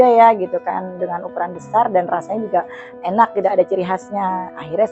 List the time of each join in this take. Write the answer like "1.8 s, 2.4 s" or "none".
none